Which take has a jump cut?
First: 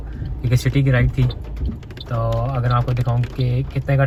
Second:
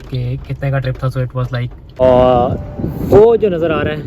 second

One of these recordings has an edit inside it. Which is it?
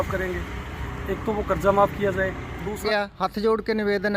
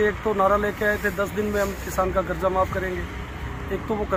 first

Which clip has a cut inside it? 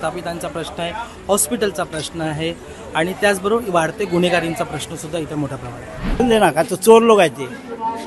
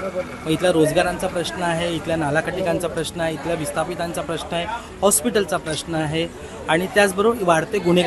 first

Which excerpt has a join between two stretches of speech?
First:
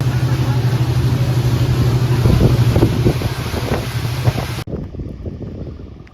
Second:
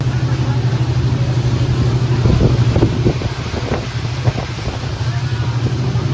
first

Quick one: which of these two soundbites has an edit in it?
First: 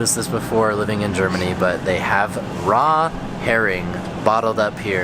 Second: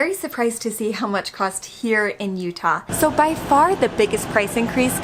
second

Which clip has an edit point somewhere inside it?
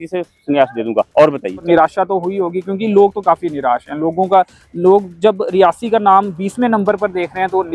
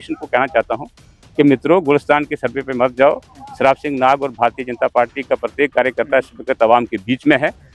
first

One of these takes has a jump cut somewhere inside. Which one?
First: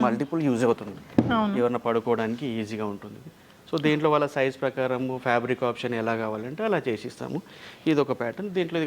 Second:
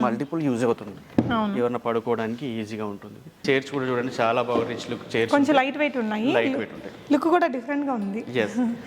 second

